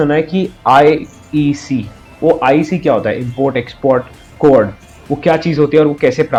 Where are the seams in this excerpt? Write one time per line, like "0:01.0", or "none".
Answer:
none